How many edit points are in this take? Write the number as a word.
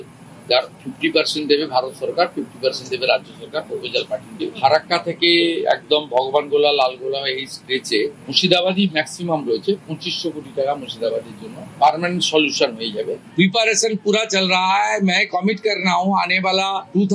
one